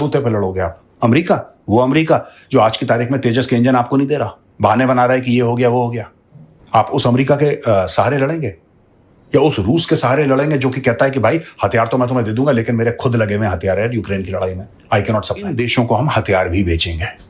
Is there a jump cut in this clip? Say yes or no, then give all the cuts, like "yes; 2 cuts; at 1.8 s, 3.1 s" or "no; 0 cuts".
yes; 1 cut; at 15.5 s